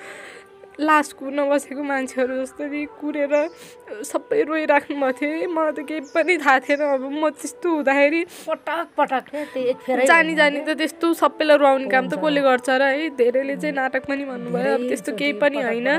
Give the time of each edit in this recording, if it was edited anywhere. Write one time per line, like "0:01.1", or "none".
none